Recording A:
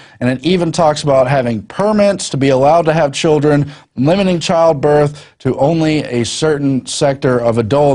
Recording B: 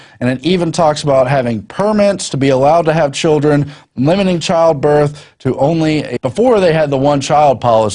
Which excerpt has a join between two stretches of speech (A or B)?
A